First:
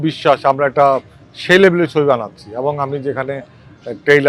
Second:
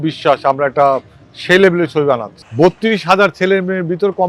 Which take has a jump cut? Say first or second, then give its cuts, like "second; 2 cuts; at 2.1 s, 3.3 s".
second; 1 cut; at 2.4 s